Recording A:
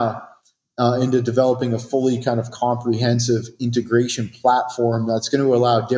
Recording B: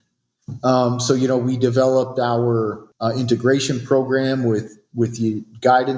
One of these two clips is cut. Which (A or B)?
B